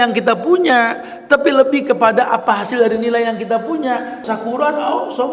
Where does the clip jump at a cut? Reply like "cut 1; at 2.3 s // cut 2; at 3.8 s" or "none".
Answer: cut 1; at 4.3 s